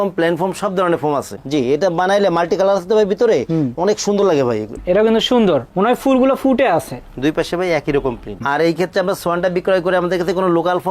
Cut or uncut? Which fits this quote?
cut